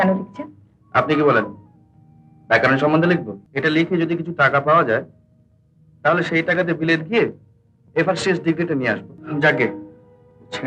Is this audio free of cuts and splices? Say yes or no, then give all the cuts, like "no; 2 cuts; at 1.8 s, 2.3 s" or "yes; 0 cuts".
no; 2 cuts; at 3.4 s, 9.1 s